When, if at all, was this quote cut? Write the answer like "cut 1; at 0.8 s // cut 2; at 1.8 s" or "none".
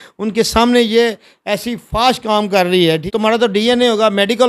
cut 1; at 3.0 s